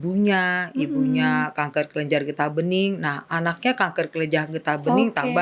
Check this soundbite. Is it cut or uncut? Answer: uncut